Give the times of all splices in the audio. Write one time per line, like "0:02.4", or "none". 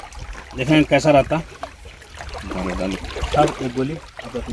none